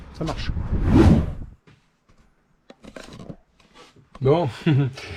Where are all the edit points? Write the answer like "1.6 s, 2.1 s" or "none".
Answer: none